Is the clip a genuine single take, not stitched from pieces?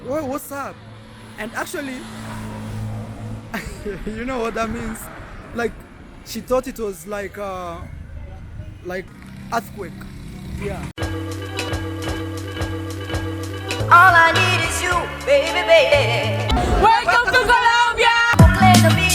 no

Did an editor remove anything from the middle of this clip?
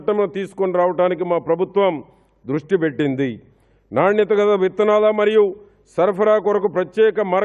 no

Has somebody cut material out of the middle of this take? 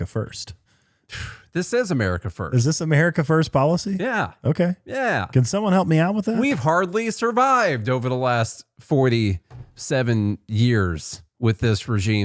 no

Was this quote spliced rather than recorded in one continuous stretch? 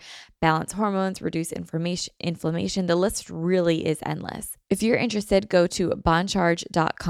yes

